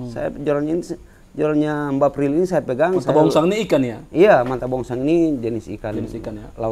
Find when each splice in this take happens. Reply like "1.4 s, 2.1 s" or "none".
none